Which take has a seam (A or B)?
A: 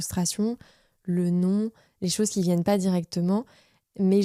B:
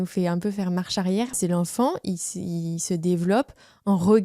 B